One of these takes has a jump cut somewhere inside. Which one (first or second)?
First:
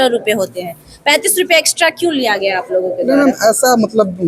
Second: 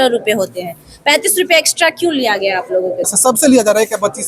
second